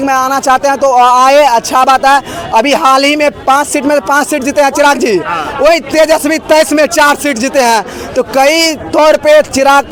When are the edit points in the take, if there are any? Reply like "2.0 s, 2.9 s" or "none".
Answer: none